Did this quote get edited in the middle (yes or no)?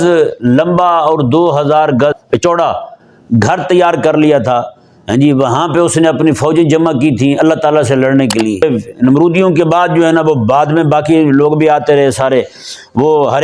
yes